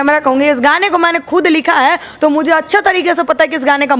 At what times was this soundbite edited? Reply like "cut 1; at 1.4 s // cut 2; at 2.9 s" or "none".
none

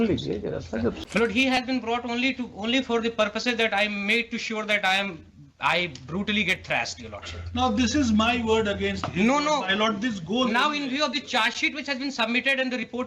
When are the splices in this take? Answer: cut 1; at 1.0 s

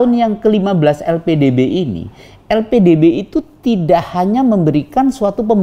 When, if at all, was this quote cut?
none

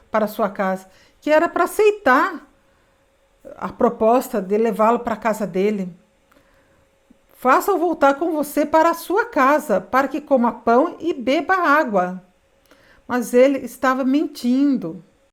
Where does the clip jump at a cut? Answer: none

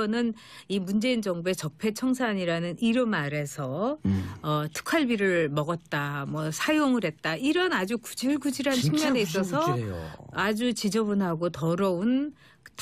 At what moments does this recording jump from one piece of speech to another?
none

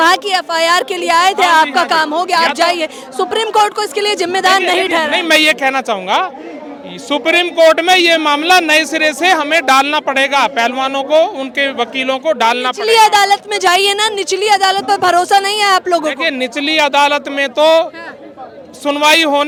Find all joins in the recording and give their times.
none

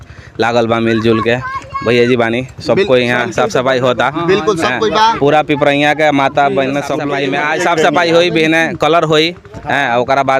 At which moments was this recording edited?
cut 1; at 7.0 s

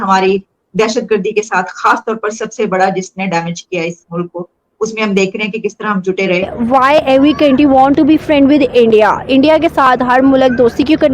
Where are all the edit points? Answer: cut 1; at 6.5 s

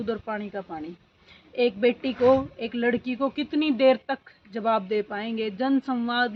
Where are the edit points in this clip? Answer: none

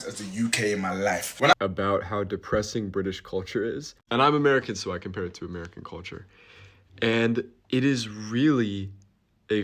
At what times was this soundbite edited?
cut 1; at 1.5 s // cut 2; at 3.9 s

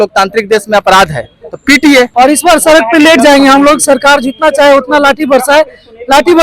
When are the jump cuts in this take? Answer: cut 1; at 2.1 s

